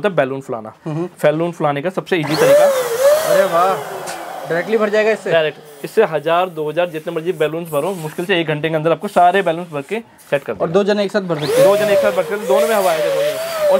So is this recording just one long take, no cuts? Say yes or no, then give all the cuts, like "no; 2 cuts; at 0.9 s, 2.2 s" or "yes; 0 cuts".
yes; 0 cuts